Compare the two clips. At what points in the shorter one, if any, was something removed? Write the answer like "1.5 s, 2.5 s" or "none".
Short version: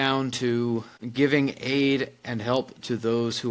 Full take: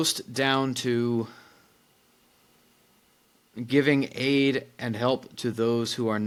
1.0 s